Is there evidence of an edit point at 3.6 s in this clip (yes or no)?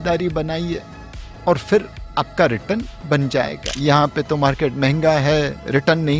yes